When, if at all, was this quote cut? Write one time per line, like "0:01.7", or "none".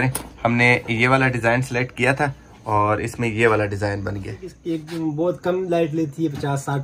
0:04.5